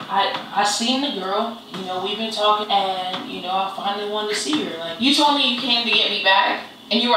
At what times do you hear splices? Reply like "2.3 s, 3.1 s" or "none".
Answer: 1.7 s, 2.6 s, 4.8 s